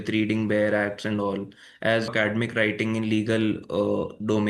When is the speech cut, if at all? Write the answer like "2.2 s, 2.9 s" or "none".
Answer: 2.1 s